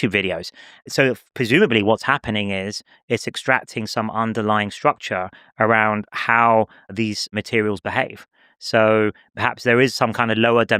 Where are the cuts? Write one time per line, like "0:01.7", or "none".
none